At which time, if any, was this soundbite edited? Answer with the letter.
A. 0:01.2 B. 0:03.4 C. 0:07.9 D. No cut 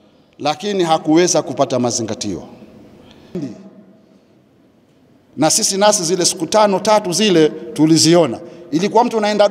B